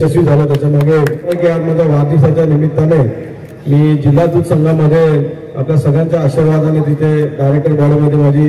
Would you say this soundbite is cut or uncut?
cut